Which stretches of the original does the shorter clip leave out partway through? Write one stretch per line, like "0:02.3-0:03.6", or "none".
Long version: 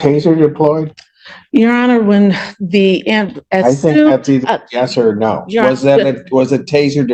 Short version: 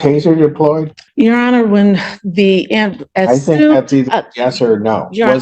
0:01.0-0:01.3